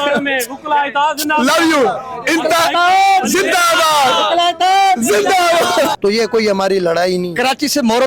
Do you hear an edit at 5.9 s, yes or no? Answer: yes